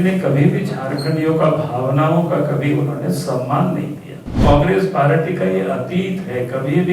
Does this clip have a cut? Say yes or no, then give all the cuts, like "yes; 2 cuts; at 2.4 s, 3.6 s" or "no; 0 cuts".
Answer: yes; 1 cut; at 4.4 s